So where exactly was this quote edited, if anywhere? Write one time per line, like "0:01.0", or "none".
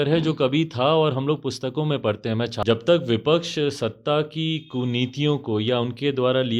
0:02.6